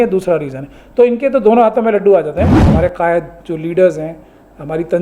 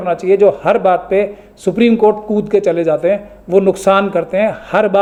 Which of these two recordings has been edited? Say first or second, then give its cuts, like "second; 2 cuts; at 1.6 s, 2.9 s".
first; 1 cut; at 2.6 s